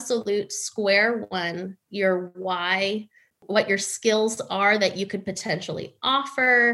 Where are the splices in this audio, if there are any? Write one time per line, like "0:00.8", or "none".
0:03.4